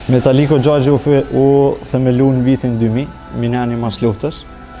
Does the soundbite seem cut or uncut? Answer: uncut